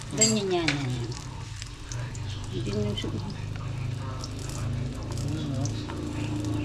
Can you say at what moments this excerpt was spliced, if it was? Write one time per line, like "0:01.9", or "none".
none